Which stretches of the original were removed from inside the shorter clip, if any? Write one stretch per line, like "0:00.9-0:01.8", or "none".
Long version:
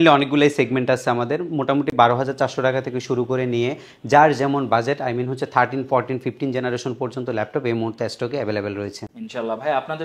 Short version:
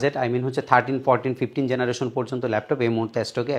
none